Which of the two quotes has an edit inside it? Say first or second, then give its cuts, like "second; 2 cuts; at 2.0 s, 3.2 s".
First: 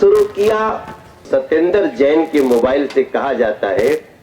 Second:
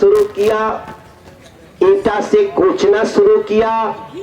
first; 1 cut; at 1.3 s